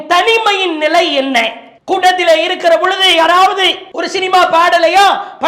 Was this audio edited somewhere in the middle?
no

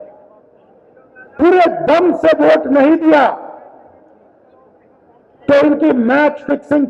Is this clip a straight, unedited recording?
yes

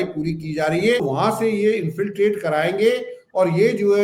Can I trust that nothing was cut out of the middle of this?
no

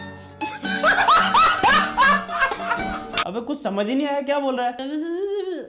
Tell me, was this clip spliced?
no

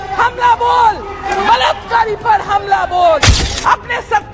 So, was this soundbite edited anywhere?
yes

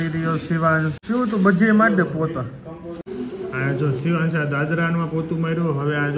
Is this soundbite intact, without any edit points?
no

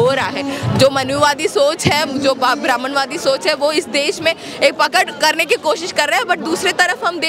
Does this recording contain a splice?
no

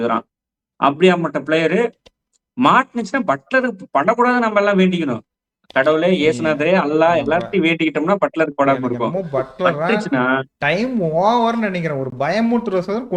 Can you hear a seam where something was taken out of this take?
no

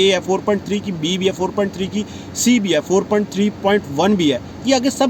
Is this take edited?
no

